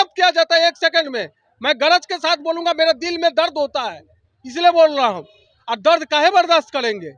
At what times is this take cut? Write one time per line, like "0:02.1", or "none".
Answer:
none